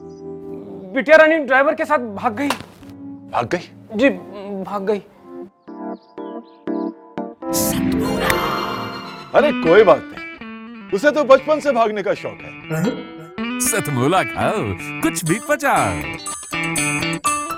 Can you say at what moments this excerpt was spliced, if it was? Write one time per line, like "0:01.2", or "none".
none